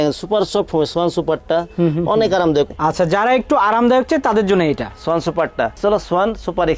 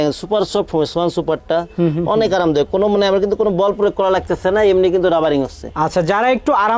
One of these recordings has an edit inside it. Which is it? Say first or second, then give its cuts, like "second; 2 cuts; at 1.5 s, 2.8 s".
first; 2 cuts; at 2.7 s, 5.8 s